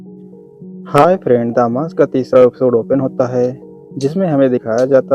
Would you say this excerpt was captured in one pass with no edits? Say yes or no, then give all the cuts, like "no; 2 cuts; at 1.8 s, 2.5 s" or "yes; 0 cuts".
no; 1 cut; at 0.9 s